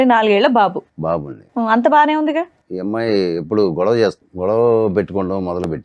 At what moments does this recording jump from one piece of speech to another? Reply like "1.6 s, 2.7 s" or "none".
2.6 s, 4.3 s